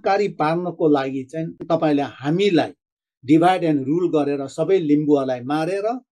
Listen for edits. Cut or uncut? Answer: cut